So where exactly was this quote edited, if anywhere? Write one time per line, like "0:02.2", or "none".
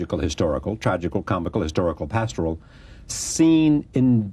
0:02.0